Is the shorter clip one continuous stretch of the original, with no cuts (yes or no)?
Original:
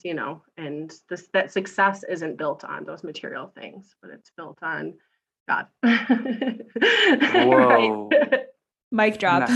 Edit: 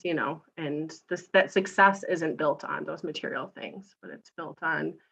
yes